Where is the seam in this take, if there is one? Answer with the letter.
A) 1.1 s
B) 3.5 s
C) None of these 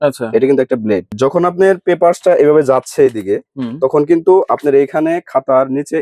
A